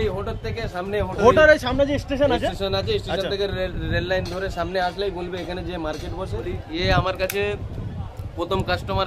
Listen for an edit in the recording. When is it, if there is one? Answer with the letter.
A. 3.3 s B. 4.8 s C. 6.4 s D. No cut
C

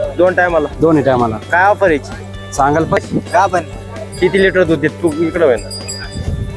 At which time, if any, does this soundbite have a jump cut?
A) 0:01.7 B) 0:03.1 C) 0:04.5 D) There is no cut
B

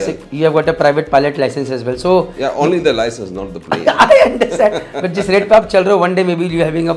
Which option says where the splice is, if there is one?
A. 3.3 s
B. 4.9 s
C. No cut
C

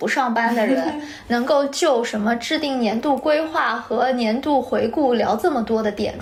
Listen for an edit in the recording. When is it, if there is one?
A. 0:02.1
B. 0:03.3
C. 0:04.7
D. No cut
D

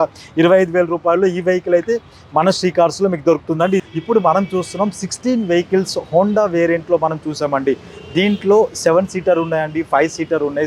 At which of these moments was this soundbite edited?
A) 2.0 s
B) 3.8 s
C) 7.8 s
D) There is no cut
B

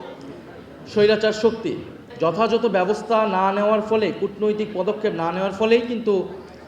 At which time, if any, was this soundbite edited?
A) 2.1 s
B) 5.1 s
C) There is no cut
A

